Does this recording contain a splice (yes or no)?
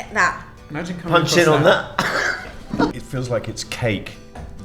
yes